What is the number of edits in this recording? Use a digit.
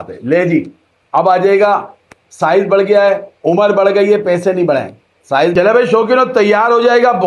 1